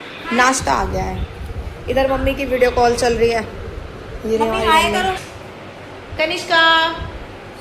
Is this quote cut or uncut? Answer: cut